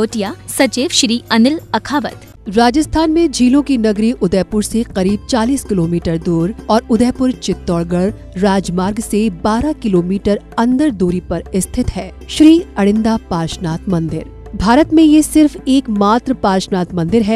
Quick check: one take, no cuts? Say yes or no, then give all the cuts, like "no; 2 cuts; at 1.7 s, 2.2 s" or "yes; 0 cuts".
no; 1 cut; at 2.3 s